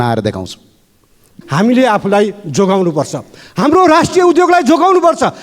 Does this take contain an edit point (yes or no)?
yes